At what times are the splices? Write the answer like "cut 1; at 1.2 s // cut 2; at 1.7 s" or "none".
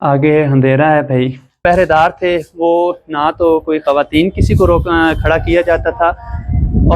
cut 1; at 1.6 s